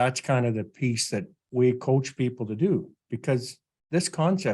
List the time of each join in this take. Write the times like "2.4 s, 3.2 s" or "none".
1.4 s